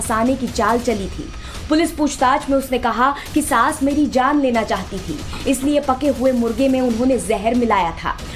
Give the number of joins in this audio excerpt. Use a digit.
1